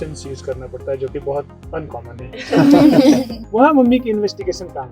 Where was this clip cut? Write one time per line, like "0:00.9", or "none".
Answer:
0:03.4